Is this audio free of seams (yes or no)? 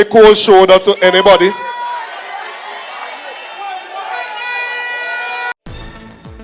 yes